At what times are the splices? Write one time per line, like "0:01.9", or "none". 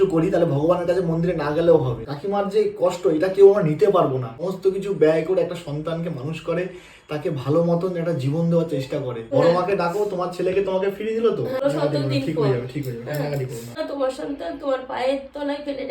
0:02.1
0:04.3
0:09.2
0:11.6
0:13.7